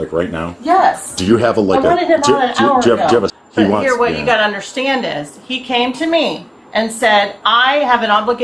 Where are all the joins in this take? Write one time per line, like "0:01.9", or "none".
0:03.4